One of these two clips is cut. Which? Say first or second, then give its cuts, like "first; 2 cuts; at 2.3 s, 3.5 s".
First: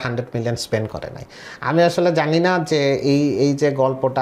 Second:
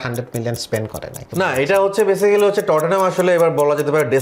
second; 1 cut; at 1.2 s